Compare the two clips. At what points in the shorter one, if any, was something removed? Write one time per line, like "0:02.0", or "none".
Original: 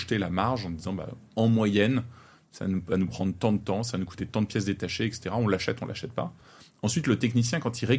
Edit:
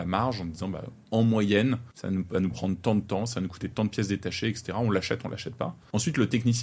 0:01.9
0:05.8